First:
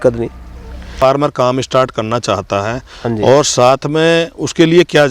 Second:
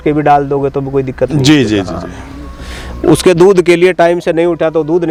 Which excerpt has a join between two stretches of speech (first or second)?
first